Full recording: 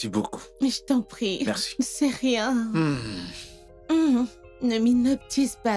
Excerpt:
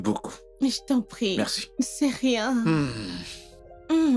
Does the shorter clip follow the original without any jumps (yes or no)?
yes